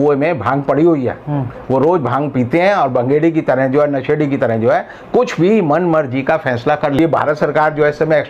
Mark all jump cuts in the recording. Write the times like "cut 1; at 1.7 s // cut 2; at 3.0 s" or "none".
cut 1; at 7.0 s